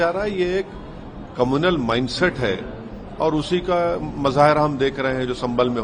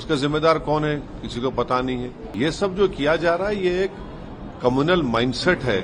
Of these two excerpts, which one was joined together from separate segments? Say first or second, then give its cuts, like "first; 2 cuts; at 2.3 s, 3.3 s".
second; 1 cut; at 2.3 s